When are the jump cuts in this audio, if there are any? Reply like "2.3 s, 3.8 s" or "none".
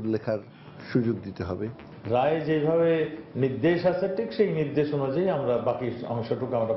1.9 s